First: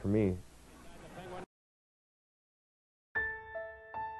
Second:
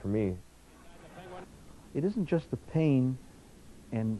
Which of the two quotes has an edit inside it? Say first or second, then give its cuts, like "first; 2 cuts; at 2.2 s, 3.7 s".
second; 1 cut; at 1.5 s